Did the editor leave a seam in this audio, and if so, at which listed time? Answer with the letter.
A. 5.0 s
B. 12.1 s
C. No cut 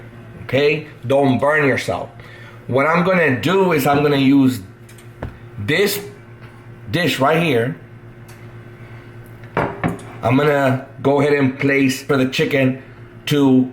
B